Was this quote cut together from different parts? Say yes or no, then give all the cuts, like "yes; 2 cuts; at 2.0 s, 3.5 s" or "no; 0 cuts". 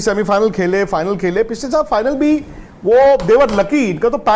no; 0 cuts